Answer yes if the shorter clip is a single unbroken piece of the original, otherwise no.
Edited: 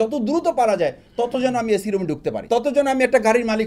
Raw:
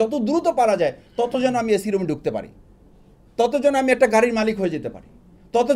no